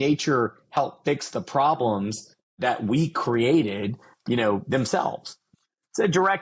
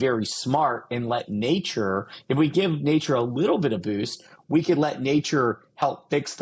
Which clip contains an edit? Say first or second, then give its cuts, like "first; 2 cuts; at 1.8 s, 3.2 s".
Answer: first; 3 cuts; at 2.5 s, 4.2 s, 5.5 s